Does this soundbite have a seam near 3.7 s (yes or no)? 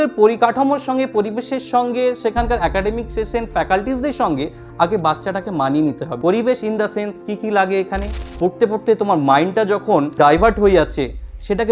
no